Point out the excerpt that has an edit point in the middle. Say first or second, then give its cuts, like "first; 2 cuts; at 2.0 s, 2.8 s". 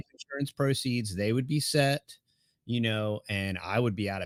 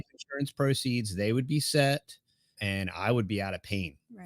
second; 1 cut; at 2.6 s